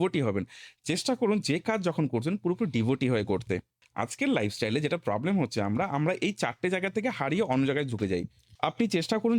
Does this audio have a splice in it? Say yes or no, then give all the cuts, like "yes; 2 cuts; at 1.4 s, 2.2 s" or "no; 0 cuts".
yes; 2 cuts; at 3.8 s, 8.4 s